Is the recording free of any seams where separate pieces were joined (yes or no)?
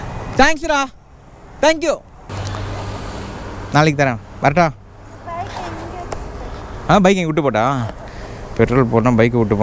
yes